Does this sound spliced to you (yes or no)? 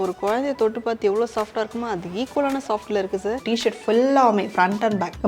yes